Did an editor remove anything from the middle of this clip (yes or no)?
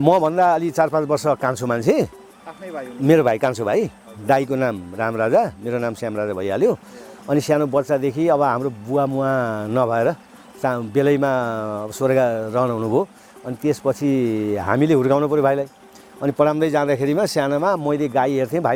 no